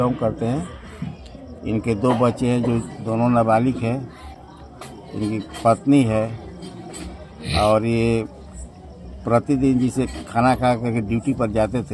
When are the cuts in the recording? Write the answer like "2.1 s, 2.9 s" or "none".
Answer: none